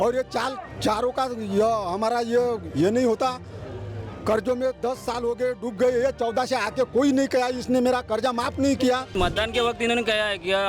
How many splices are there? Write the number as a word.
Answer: one